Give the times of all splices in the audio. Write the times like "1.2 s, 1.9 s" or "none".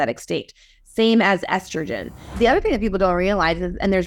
2.3 s

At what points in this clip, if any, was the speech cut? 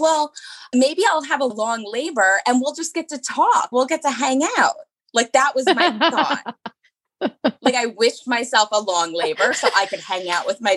none

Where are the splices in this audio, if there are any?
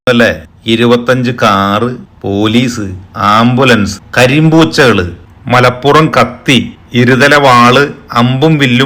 none

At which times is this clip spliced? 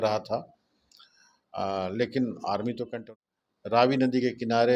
2.8 s

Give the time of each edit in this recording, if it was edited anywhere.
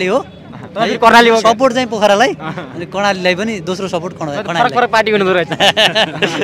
none

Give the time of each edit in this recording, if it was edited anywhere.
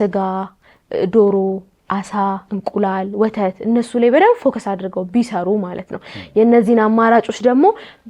none

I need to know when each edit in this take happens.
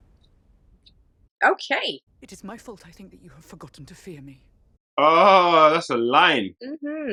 none

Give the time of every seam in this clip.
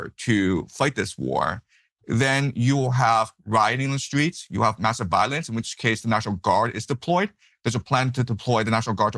none

